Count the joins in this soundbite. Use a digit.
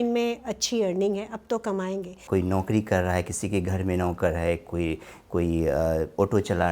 1